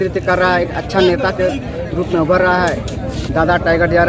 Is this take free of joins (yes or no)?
yes